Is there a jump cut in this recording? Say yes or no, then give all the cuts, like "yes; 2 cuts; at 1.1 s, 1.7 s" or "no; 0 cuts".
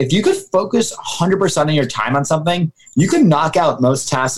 no; 0 cuts